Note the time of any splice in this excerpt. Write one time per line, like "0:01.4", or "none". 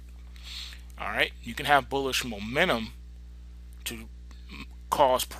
none

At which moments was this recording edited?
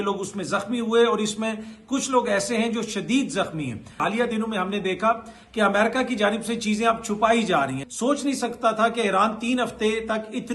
0:04.0
0:07.8

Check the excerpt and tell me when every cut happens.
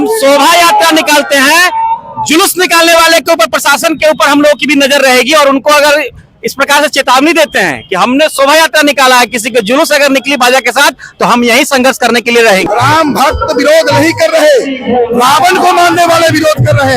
0:12.7

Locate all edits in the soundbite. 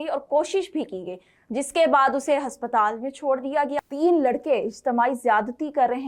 0:03.8

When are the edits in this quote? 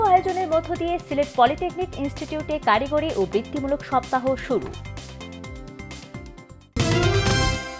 0:06.7

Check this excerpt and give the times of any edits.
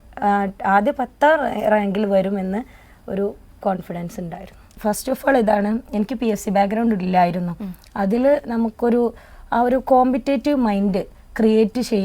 0:04.8

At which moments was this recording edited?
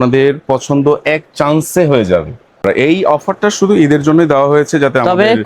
0:02.6

